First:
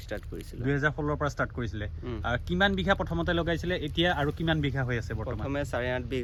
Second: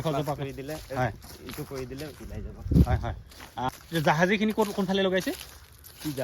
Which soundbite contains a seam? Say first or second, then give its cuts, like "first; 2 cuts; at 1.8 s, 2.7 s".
second; 1 cut; at 3.7 s